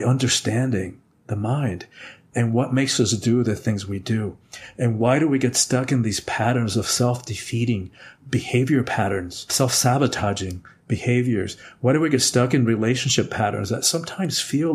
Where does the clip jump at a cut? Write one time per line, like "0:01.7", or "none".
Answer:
none